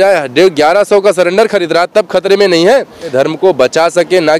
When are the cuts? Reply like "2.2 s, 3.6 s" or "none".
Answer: 3.1 s